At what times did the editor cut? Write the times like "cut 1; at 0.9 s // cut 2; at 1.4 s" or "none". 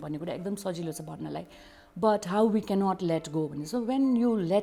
none